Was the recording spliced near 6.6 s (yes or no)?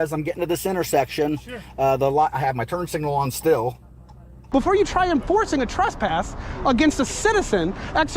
no